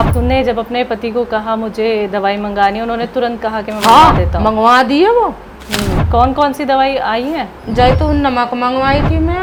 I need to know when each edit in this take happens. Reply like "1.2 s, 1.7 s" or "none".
none